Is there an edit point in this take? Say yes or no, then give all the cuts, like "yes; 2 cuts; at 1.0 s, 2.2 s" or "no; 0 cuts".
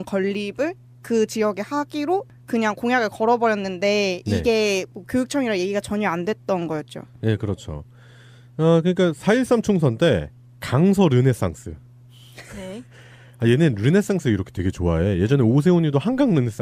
yes; 1 cut; at 15.2 s